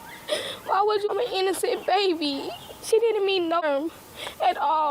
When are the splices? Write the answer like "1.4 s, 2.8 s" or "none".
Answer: 1.1 s, 3.6 s